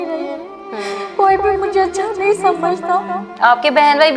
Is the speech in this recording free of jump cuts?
yes; 0 cuts

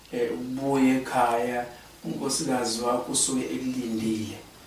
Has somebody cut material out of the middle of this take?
no; 0 cuts

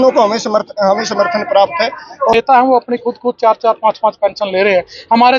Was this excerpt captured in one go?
no; 1 cut; at 2.3 s

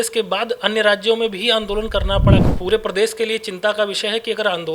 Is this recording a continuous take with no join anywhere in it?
no; 1 cut; at 2.5 s

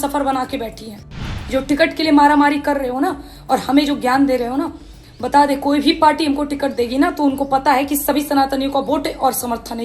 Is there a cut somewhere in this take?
yes; 1 cut; at 1.2 s

